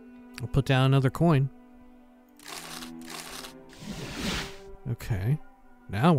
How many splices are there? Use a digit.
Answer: 1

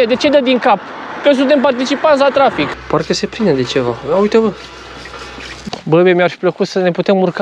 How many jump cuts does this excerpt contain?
2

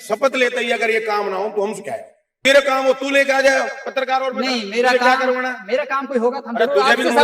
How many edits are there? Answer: 1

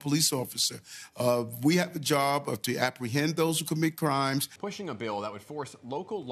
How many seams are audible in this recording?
0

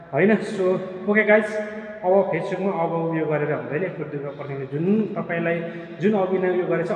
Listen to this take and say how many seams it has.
0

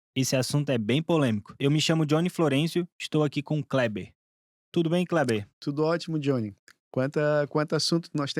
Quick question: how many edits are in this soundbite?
1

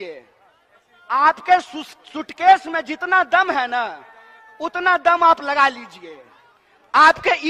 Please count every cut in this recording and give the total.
0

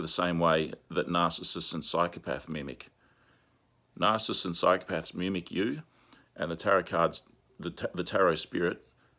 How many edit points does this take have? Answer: 0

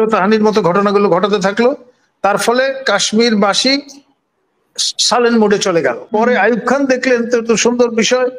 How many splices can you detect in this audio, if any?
1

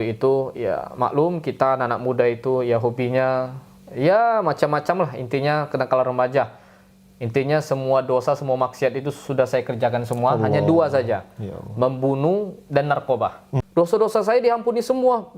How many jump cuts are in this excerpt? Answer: 1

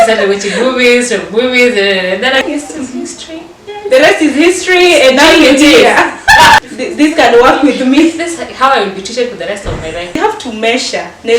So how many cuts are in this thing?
3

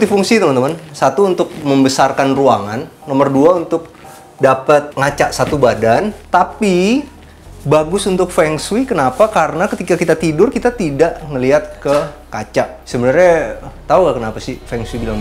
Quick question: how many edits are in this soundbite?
3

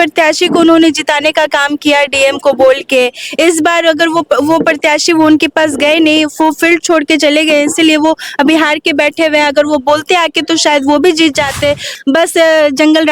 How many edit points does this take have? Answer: 1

